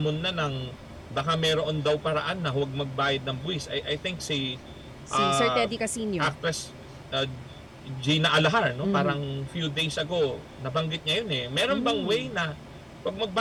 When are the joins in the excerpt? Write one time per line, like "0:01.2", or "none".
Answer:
none